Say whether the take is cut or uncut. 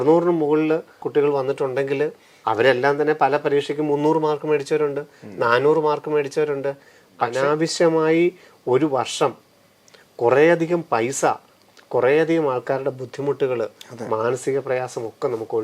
cut